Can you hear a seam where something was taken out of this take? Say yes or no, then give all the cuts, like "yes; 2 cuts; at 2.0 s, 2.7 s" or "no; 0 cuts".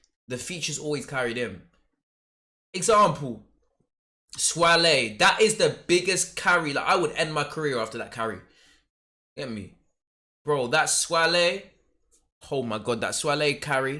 no; 0 cuts